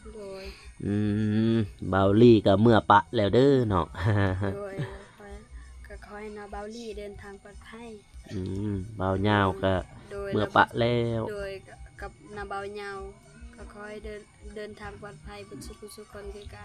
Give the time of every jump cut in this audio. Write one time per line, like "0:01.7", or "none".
none